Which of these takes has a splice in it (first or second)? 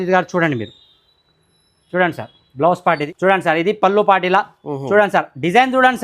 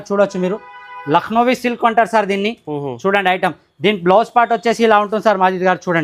first